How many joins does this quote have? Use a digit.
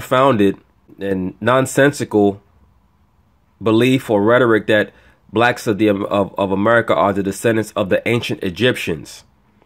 1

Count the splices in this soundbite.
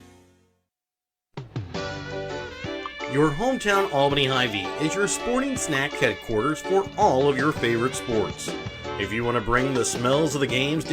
1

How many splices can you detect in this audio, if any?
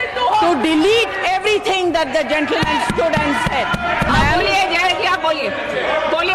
1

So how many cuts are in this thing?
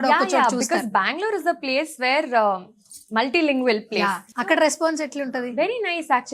1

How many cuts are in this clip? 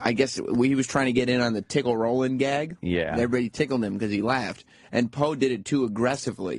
0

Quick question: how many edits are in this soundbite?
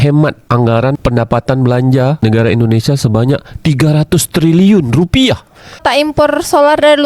2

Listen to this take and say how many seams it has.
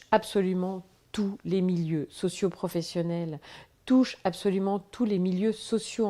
0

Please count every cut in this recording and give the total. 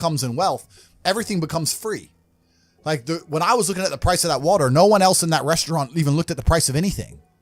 0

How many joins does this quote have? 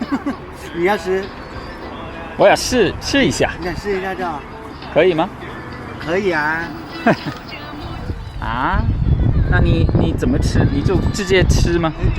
1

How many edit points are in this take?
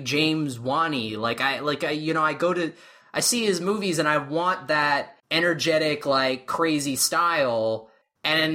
1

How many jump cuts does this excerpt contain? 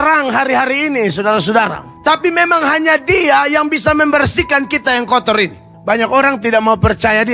2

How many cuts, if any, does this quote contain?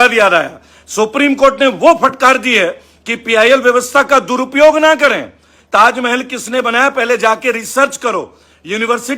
0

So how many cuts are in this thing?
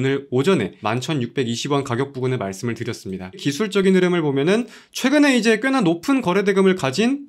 1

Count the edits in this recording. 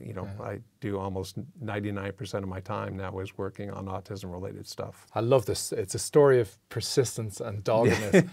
1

